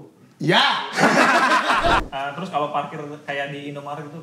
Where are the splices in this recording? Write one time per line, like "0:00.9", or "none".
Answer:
0:02.1